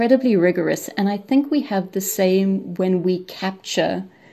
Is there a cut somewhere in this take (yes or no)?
no